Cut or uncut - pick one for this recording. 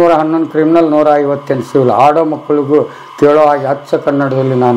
uncut